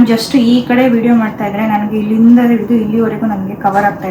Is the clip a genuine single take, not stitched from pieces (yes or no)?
yes